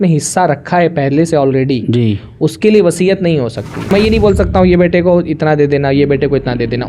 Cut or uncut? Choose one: cut